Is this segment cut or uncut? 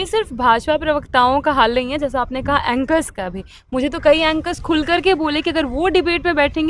uncut